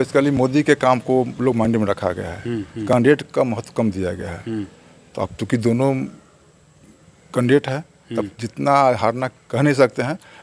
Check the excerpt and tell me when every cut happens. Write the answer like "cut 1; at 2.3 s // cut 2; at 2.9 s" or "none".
none